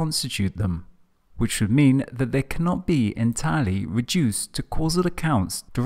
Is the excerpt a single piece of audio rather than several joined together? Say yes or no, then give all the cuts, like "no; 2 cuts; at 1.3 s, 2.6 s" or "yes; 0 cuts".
yes; 0 cuts